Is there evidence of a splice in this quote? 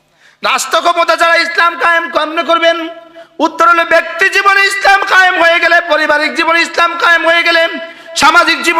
no; 0 cuts

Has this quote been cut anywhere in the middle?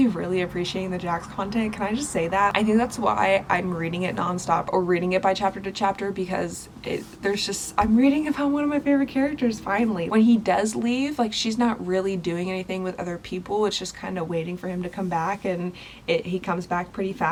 no; 0 cuts

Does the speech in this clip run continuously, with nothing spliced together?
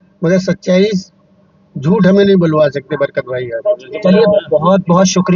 yes; 0 cuts

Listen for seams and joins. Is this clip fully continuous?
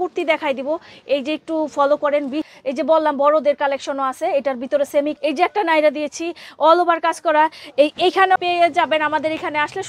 no; 3 cuts; at 2.4 s, 5.1 s, 8.4 s

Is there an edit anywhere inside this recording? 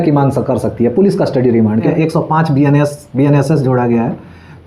yes; 1 cut; at 1.9 s

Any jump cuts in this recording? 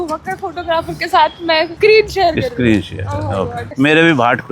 yes; 2 cuts; at 1.7 s, 3.6 s

